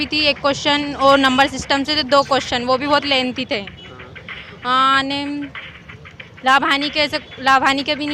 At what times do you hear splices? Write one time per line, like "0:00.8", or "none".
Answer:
none